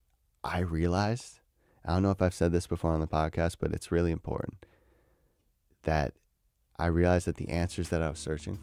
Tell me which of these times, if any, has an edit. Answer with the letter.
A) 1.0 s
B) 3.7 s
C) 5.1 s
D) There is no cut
D